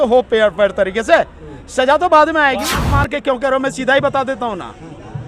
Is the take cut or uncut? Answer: cut